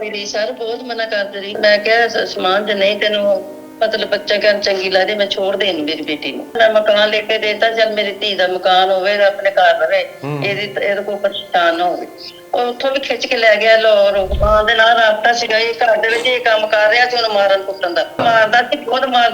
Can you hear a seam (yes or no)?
yes